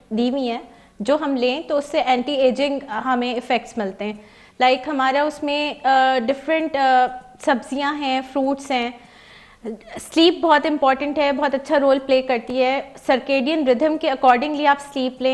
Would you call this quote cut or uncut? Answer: uncut